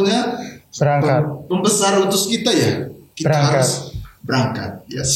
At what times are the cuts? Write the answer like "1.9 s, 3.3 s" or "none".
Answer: none